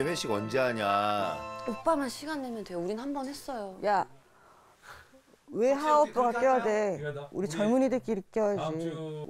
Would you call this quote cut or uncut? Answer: cut